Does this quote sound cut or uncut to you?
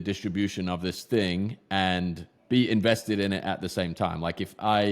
cut